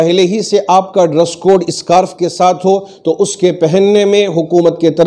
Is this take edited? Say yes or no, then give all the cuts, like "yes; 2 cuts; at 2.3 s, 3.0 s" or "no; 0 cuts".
no; 0 cuts